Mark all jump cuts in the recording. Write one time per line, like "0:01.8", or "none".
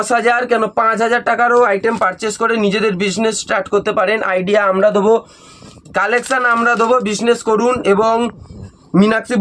none